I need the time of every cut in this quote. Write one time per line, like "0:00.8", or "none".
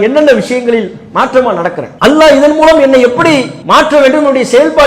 0:01.9
0:03.6